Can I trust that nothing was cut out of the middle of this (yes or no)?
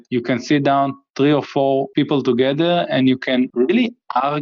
no